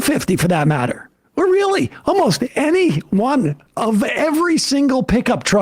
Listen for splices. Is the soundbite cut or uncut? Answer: cut